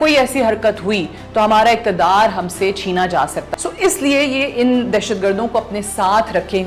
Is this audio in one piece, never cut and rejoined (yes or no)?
no